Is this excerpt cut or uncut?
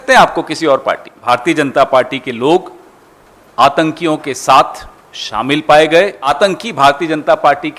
cut